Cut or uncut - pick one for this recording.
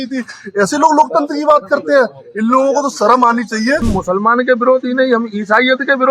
cut